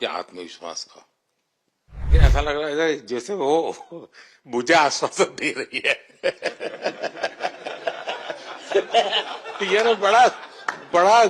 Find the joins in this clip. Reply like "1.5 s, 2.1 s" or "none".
2.1 s